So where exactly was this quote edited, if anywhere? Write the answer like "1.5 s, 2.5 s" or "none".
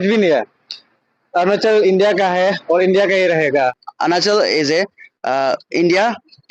3.8 s